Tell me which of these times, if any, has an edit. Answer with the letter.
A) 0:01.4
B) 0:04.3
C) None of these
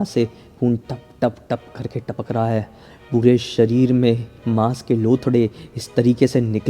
B